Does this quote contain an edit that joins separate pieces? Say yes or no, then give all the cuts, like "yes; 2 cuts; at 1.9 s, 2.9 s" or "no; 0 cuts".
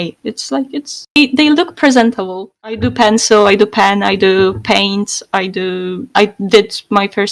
yes; 1 cut; at 2.5 s